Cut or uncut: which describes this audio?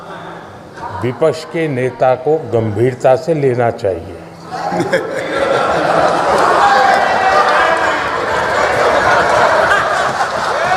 uncut